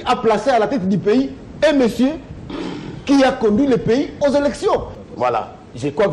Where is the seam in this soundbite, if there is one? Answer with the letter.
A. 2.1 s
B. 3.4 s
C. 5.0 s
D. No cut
C